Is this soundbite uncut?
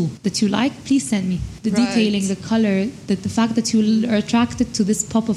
yes; 0 cuts

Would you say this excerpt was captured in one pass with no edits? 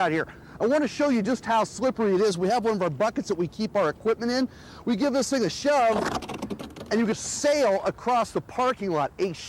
no; 1 cut; at 7.1 s

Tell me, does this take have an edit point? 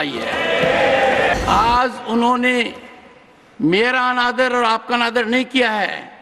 yes; 1 cut; at 1.3 s

